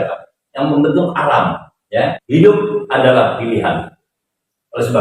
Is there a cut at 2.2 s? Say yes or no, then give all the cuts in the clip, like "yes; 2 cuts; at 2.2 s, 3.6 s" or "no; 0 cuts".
yes; 1 cut; at 2.2 s